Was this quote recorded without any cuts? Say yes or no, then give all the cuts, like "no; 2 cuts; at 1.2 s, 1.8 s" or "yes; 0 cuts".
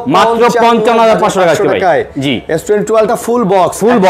yes; 0 cuts